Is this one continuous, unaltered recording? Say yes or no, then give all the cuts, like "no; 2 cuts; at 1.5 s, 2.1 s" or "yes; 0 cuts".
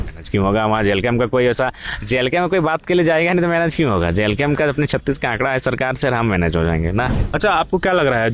no; 1 cut; at 7.2 s